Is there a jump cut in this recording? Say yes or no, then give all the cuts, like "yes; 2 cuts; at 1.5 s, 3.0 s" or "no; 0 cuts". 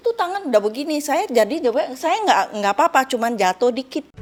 no; 0 cuts